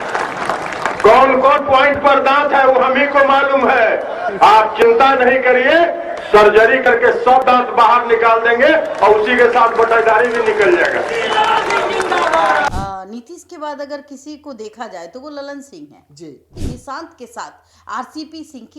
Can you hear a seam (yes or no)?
yes